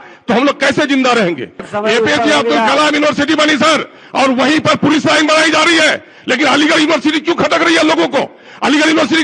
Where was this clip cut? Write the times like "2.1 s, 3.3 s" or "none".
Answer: 1.7 s